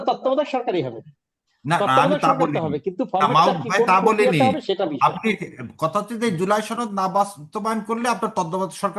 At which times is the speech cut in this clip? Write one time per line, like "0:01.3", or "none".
none